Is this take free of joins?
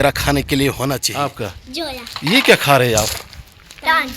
no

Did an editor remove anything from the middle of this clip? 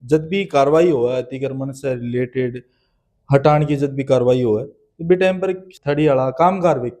yes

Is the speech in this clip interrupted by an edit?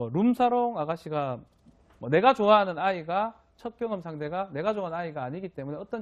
yes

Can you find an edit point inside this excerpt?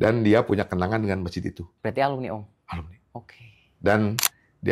yes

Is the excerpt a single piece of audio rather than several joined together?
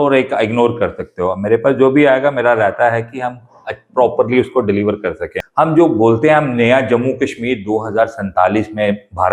no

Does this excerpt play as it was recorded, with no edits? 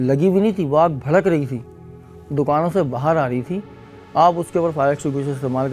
yes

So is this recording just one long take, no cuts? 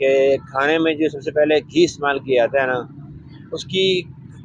yes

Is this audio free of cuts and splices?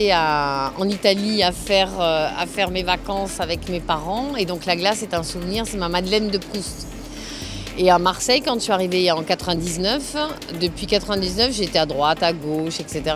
no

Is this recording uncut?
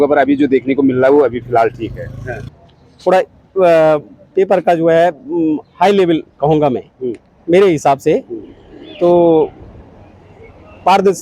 no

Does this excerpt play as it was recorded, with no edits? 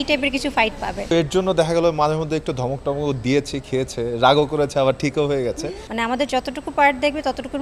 no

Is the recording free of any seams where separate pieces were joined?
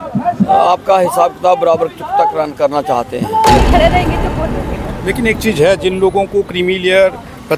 no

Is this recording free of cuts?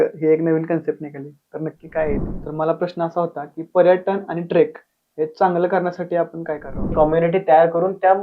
no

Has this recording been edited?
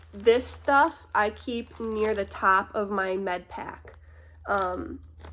no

